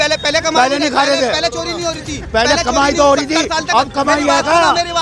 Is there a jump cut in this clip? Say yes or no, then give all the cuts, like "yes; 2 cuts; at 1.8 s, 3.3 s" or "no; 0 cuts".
no; 0 cuts